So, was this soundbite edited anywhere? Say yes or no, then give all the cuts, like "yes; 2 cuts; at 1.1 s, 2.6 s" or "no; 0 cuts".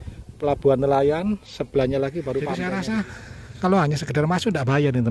yes; 1 cut; at 2.6 s